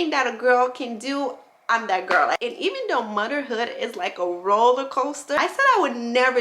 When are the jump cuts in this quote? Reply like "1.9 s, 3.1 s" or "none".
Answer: 2.4 s, 5.4 s